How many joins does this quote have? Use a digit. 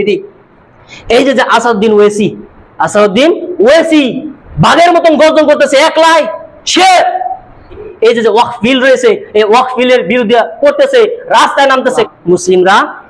2